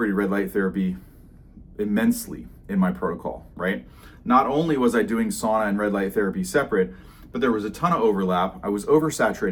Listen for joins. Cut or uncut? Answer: uncut